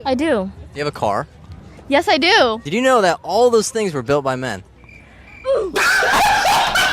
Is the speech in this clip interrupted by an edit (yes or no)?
no